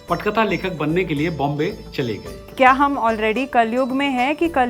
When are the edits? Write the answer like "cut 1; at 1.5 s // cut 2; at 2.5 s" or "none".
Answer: cut 1; at 2.5 s